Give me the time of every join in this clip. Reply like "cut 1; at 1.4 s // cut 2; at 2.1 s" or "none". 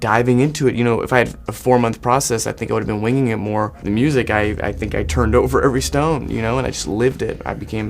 cut 1; at 3.8 s